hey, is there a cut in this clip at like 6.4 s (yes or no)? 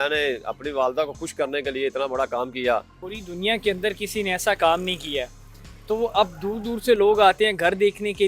no